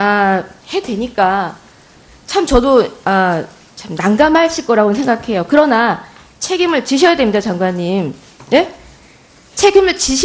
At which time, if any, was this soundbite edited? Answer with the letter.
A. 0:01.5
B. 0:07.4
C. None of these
A